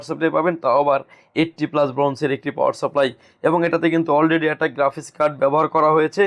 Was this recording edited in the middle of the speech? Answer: no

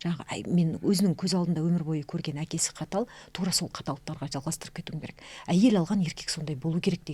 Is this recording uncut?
yes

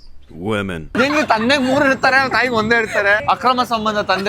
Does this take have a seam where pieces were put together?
no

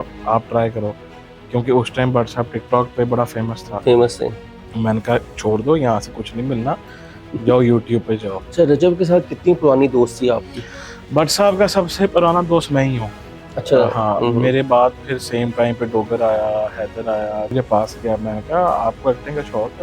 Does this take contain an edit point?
yes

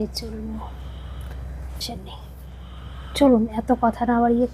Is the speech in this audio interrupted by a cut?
yes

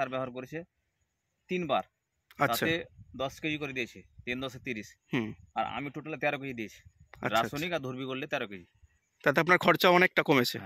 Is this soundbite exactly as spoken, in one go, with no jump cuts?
yes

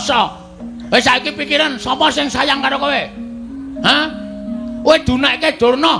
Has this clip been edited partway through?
no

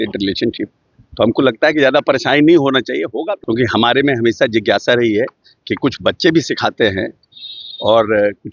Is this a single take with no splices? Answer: no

